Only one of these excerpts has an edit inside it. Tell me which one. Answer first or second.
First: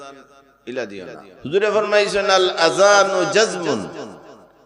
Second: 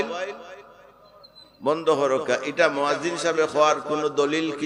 first